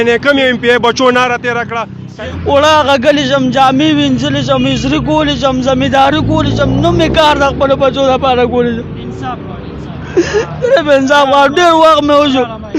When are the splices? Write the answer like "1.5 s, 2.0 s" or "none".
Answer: 2.1 s